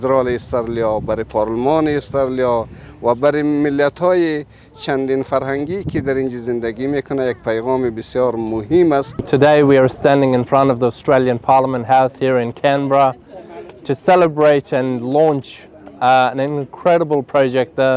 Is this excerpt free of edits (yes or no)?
no